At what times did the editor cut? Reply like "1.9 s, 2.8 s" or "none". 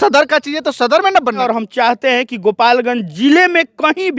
1.4 s